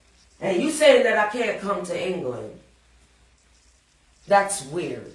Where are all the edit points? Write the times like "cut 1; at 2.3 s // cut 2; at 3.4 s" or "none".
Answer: cut 1; at 3.3 s

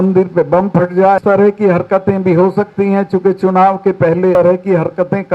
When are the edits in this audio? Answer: cut 1; at 1.2 s // cut 2; at 4.3 s

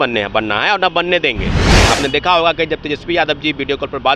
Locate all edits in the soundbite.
cut 1; at 1.8 s

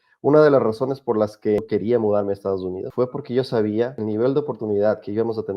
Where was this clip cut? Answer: cut 1; at 1.6 s // cut 2; at 2.8 s // cut 3; at 4.0 s

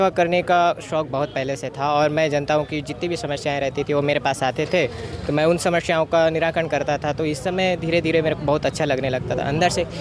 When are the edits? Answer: none

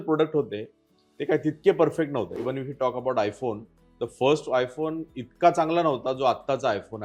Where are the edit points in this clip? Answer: cut 1; at 2.3 s

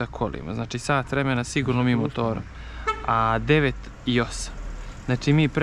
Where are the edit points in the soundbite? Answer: none

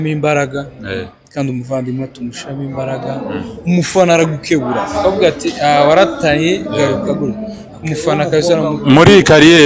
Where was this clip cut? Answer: none

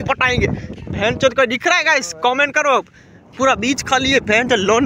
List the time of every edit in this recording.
cut 1; at 3.5 s

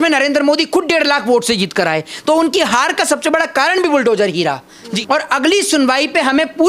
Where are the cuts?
cut 1; at 4.9 s

